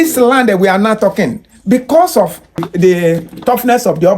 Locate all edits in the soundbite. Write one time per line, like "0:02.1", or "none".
0:02.6